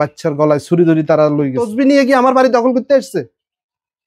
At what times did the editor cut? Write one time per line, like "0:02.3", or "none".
0:01.6